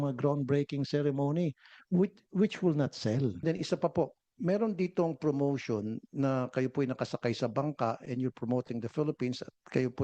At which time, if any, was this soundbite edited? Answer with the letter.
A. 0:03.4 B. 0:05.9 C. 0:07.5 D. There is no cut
A